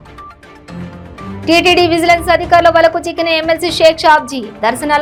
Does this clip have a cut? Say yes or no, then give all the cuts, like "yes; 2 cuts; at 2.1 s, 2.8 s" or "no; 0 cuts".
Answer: no; 0 cuts